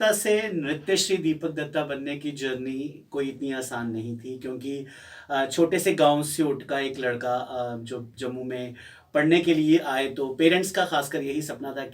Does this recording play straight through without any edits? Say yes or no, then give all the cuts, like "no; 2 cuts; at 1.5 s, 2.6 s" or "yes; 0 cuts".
yes; 0 cuts